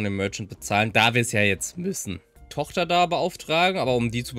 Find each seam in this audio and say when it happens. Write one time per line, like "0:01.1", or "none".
0:02.4